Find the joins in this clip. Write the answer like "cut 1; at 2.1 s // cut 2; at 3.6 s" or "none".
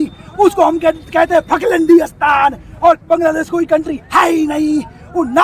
none